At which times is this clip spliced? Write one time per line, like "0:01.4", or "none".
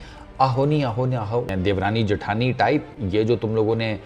0:01.5